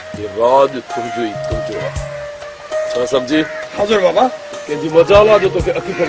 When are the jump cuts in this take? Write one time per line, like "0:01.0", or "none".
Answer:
0:01.7